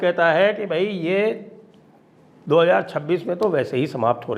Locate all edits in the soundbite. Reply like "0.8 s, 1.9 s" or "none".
none